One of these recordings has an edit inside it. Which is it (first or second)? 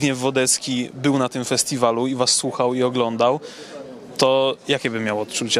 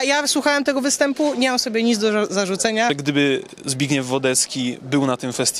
second